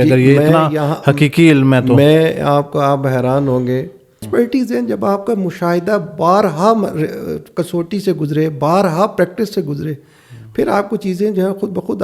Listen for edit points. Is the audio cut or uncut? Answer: cut